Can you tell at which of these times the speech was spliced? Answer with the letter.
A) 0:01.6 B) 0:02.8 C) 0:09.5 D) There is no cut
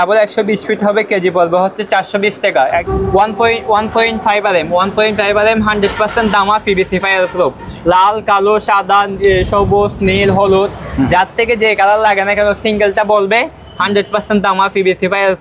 B